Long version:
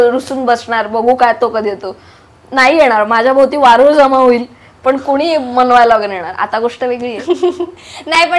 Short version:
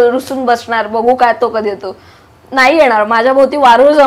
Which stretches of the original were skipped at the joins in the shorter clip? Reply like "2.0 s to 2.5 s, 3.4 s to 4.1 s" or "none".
none